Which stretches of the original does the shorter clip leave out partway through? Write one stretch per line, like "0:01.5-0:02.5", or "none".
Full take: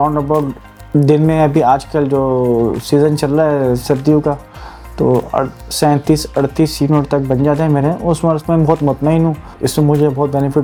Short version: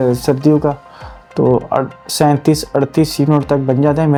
none